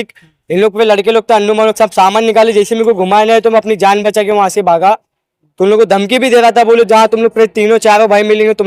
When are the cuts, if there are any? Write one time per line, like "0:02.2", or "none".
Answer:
none